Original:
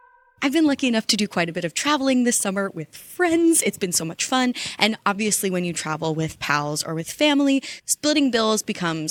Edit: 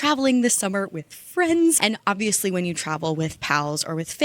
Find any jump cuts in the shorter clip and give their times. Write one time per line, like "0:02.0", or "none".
0:01.8